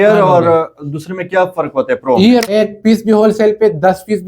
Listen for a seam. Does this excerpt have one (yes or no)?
yes